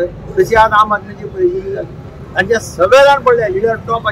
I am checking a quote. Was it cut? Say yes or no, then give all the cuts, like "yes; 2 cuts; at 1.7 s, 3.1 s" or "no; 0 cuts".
no; 0 cuts